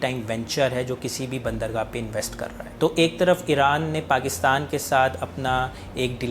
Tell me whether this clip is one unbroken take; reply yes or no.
no